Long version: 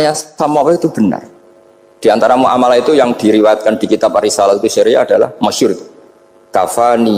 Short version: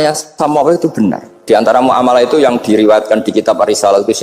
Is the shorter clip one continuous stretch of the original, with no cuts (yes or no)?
no